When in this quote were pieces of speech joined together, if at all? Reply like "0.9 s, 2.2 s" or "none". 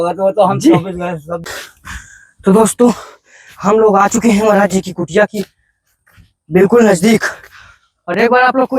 1.3 s